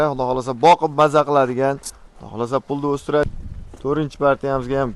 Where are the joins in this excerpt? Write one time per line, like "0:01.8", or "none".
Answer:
0:03.2